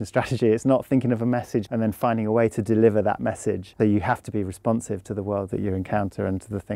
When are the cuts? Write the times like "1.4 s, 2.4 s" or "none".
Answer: 1.7 s, 3.7 s